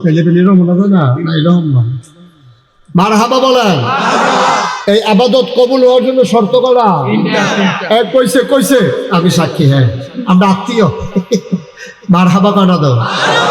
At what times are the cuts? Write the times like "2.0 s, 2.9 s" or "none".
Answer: 4.7 s